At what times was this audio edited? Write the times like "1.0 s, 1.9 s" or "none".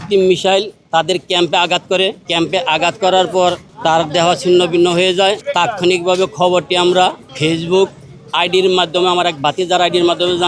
2.2 s, 3.7 s, 5.4 s, 7.3 s